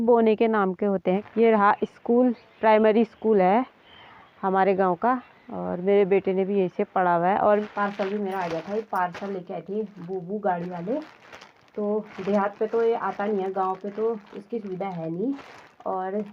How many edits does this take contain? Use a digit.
2